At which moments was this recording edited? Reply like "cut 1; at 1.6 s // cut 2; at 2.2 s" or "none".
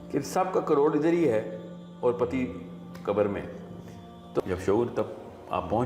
cut 1; at 4.4 s